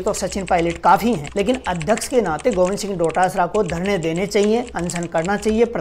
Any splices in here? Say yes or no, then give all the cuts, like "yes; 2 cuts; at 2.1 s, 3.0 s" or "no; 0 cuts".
no; 0 cuts